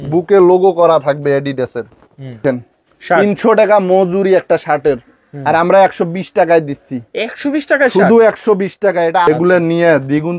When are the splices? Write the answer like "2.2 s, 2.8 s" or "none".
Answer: 2.4 s, 9.3 s